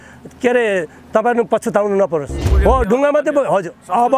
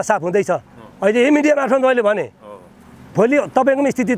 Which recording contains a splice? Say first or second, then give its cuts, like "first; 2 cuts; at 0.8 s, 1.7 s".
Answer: first; 1 cut; at 2.4 s